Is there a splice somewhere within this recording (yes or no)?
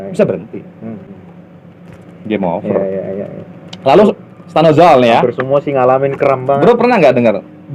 no